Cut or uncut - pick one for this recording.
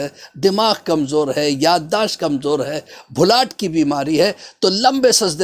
uncut